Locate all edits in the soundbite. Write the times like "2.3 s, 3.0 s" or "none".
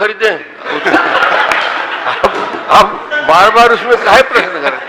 none